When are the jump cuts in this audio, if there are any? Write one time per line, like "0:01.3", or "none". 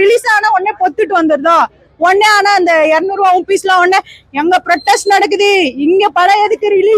none

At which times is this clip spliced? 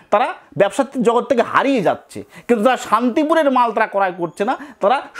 none

